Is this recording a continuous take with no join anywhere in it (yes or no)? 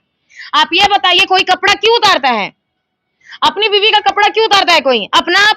yes